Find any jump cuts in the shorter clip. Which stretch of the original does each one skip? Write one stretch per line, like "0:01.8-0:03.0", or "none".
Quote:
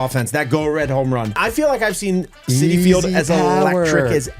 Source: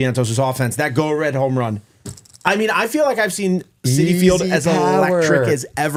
0:01.8-0:02.7